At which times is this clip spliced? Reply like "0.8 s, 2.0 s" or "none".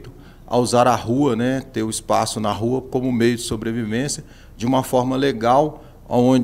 none